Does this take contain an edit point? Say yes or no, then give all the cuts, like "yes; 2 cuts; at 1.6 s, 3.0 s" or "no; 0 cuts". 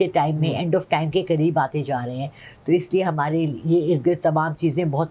no; 0 cuts